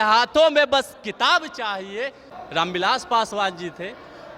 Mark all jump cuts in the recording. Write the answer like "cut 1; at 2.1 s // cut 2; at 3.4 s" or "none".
cut 1; at 2.3 s